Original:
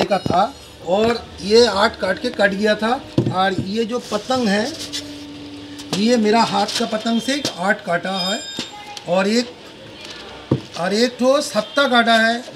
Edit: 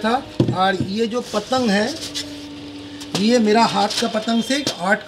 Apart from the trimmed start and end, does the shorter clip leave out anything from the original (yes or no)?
no